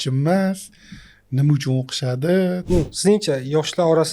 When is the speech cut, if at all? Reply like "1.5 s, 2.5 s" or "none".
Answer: 2.6 s